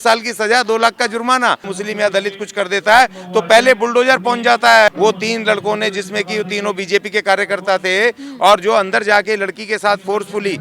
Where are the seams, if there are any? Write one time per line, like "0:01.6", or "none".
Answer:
0:01.7
0:04.9

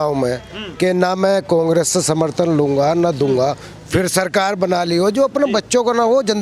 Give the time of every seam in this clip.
none

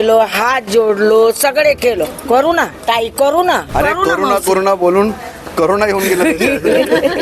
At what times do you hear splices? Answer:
0:02.7
0:03.7

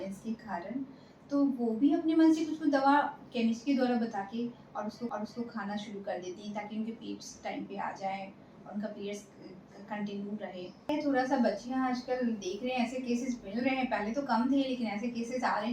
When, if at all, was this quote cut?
0:10.9

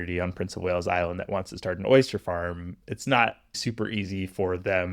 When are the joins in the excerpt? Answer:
0:03.6

